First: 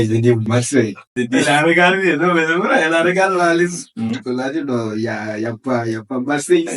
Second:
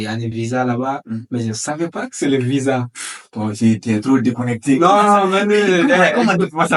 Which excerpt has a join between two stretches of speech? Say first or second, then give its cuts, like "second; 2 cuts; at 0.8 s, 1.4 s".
first; 1 cut; at 1.1 s